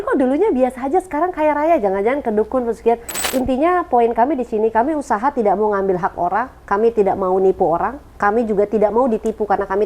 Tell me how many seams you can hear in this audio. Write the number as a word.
one